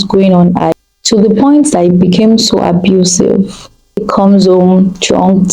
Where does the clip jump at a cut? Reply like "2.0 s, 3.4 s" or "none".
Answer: 0.7 s, 4.0 s